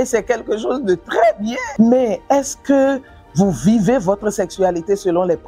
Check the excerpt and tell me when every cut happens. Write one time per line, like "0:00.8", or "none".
0:01.6